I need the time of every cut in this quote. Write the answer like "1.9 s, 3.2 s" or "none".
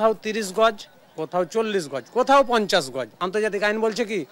3.1 s